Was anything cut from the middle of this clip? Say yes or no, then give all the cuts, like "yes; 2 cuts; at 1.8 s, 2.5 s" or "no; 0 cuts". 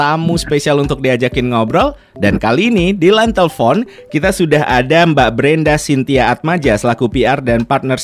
no; 0 cuts